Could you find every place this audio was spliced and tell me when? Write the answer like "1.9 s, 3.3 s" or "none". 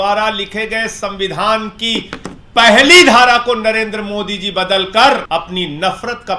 5.2 s